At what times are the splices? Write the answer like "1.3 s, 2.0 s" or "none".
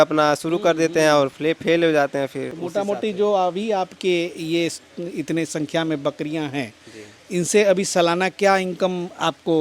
2.5 s